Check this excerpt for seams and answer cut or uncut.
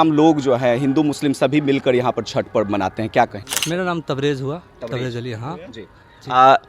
cut